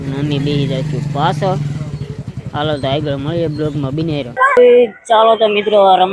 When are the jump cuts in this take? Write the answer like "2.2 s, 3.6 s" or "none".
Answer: 4.3 s